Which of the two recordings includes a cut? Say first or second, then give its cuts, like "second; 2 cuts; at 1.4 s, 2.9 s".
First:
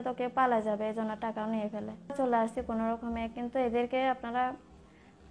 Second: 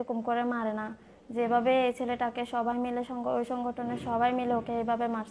first; 1 cut; at 2.1 s